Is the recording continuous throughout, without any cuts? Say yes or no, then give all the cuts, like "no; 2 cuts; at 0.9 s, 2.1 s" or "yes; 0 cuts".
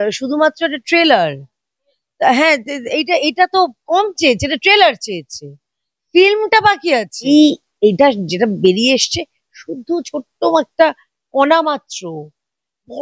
no; 1 cut; at 7.3 s